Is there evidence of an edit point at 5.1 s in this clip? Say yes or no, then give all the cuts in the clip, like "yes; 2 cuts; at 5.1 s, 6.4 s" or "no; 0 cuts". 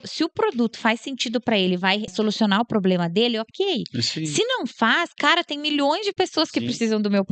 no; 1 cut; at 2.1 s